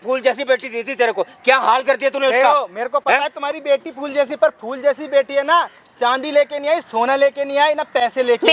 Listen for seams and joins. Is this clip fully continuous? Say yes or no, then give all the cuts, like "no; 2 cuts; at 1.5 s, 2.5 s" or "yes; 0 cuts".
yes; 0 cuts